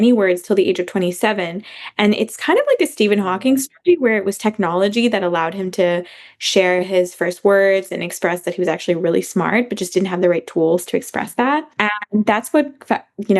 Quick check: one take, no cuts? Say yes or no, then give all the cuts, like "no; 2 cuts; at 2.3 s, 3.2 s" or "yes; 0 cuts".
no; 1 cut; at 11.8 s